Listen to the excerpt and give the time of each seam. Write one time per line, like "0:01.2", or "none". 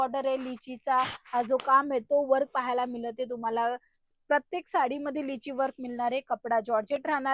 none